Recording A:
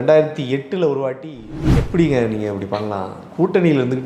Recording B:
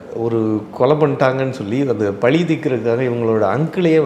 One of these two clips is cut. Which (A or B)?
A